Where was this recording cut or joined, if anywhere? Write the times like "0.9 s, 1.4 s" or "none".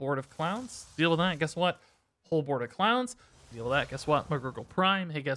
3.4 s